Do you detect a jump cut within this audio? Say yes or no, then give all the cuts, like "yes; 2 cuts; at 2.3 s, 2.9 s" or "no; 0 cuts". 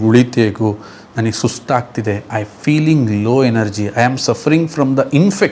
no; 0 cuts